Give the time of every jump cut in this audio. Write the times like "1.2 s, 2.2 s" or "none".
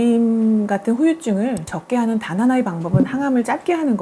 none